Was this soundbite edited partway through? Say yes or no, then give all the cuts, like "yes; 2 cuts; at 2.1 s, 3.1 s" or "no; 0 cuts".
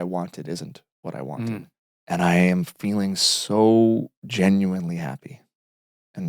yes; 1 cut; at 1.7 s